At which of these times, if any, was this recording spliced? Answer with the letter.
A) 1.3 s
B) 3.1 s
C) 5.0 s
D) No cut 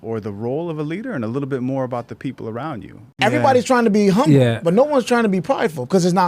B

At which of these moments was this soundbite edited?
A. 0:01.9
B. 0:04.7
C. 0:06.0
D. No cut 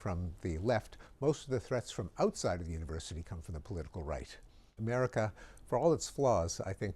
B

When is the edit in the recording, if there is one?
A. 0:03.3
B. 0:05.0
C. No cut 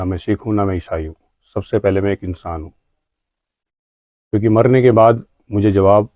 C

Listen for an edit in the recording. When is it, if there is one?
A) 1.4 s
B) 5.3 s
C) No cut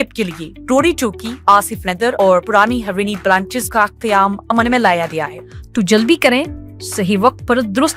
B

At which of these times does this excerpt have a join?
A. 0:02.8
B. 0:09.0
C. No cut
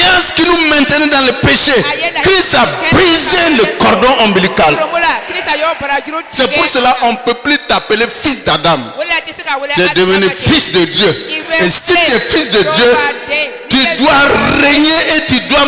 C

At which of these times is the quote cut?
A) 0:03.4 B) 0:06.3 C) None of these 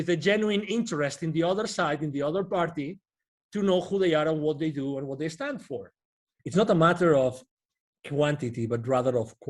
B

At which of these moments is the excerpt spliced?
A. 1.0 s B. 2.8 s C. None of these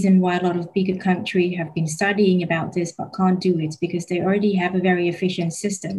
C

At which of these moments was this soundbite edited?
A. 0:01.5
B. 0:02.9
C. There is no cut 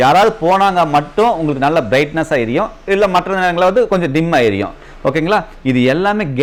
C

